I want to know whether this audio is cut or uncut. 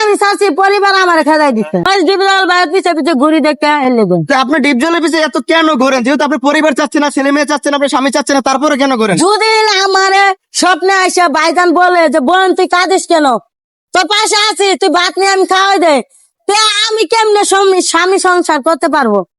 cut